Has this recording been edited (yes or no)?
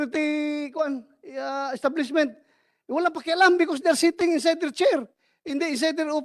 no